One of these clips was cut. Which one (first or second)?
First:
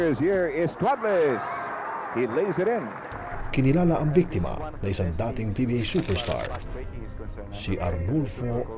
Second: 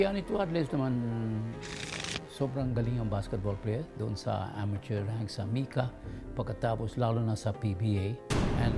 second